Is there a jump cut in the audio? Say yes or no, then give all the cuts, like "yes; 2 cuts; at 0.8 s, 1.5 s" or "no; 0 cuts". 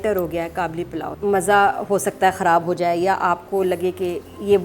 yes; 1 cut; at 1.1 s